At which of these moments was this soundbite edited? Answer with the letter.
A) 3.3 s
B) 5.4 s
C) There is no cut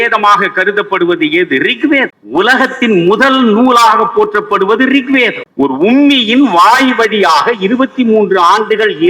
B